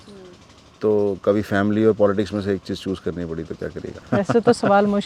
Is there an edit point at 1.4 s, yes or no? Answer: no